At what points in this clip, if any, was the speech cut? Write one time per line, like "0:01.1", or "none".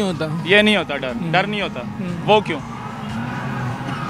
none